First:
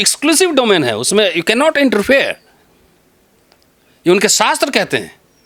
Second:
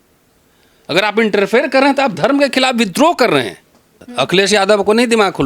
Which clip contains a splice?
second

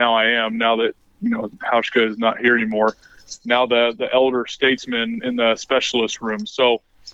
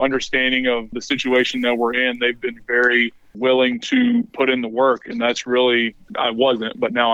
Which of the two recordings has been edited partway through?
second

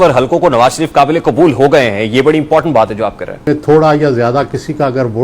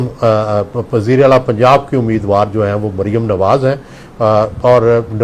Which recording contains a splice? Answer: first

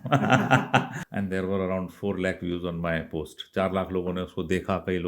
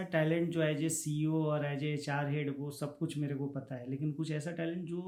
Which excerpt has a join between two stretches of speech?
first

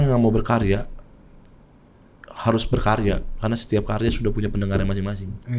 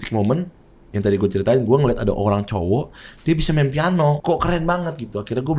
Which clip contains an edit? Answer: second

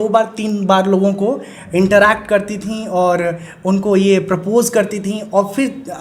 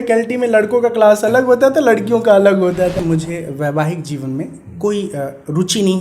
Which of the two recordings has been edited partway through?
second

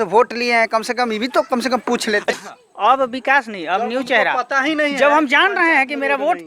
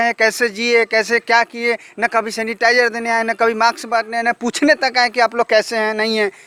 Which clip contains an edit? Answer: first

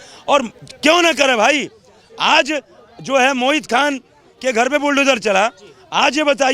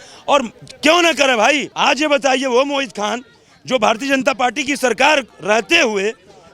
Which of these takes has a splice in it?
second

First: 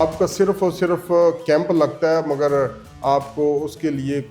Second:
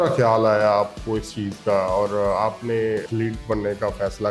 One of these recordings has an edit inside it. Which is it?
second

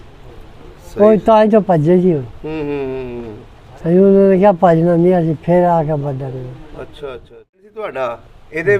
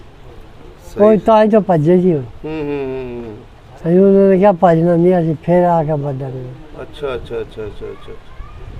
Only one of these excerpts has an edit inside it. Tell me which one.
first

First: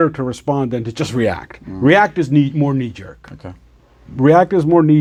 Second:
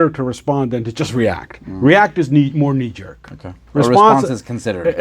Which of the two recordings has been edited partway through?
second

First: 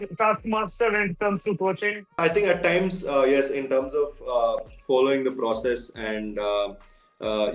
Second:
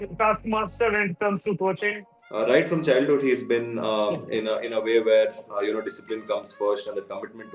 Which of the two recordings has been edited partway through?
second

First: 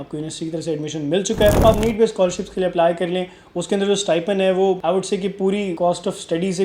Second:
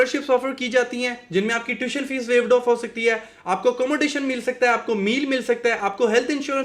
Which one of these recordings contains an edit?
first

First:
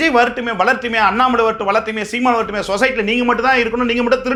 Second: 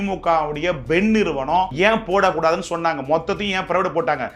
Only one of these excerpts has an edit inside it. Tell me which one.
second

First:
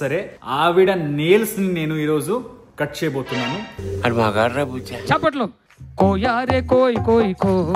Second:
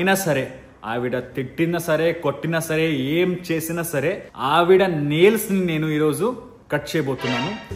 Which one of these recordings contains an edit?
first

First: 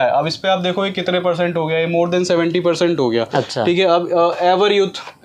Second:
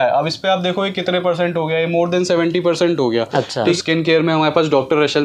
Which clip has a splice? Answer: second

